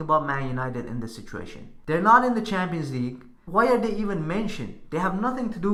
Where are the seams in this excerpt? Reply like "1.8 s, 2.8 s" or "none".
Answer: none